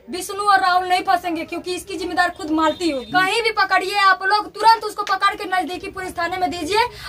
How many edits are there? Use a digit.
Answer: 1